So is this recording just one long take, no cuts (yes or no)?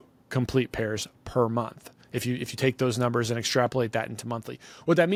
yes